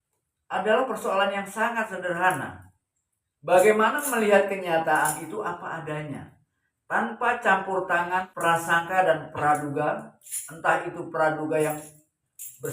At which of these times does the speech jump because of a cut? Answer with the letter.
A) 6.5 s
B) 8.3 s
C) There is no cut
B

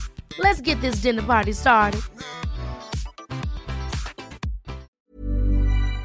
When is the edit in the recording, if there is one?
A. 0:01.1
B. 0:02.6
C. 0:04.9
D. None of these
C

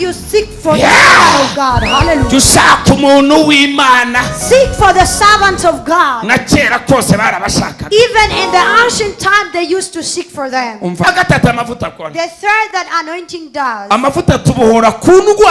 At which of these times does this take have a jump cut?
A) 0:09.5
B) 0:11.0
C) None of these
B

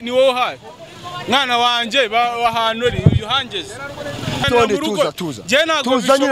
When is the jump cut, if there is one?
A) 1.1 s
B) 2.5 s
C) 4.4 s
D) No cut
C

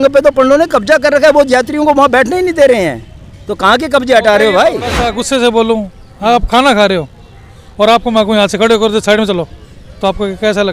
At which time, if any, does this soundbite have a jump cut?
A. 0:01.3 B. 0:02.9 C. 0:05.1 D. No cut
C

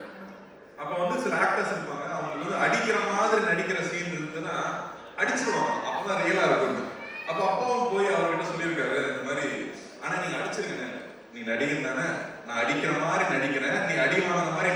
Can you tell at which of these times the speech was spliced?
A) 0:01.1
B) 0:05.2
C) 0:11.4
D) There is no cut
D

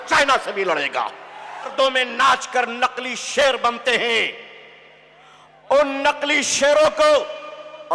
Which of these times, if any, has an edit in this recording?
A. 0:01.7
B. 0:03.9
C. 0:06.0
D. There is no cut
A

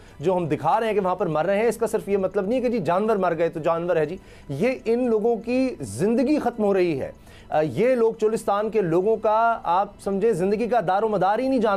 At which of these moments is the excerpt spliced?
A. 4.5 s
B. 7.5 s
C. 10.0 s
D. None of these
D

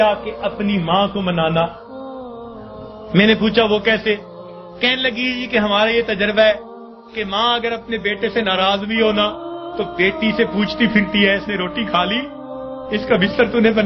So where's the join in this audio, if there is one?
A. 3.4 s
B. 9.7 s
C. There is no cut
A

